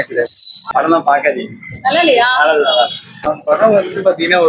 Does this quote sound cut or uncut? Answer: cut